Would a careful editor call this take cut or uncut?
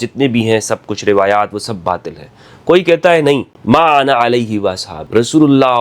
cut